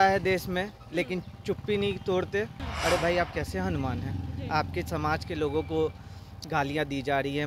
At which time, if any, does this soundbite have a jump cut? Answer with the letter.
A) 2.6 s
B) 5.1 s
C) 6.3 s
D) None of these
A